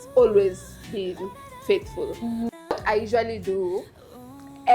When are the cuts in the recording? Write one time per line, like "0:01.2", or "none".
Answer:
0:02.8